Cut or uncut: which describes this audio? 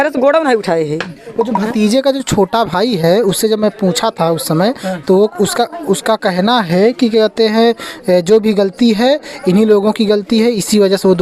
uncut